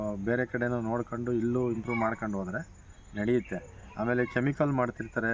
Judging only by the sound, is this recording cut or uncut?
uncut